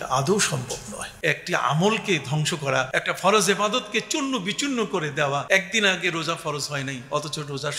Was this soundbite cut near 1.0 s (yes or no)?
yes